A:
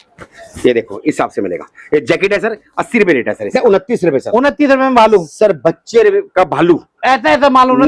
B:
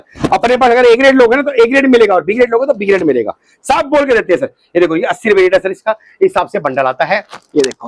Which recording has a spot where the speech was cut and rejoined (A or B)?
A